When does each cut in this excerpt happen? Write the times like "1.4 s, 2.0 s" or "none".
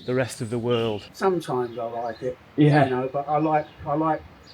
1.1 s

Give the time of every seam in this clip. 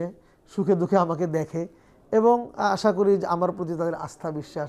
none

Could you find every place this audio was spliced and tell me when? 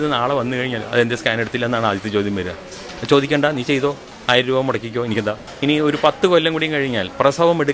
4.1 s, 5.5 s

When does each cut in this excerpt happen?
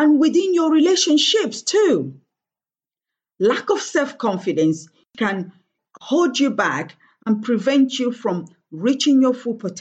5.1 s

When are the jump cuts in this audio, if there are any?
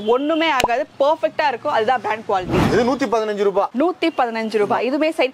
2.6 s

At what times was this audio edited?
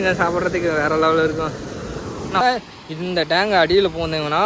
2.4 s

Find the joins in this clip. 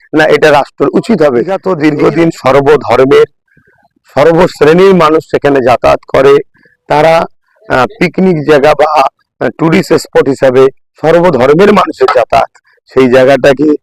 1.6 s

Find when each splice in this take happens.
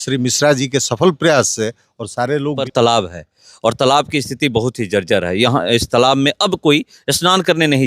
2.6 s

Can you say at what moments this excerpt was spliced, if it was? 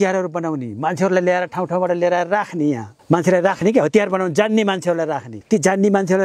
2.9 s, 5.3 s

